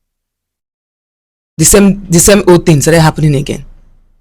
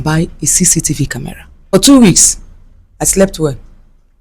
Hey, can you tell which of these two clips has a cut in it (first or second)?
second